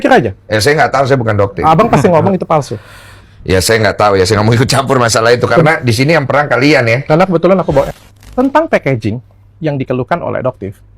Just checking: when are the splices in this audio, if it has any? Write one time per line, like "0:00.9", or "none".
0:08.0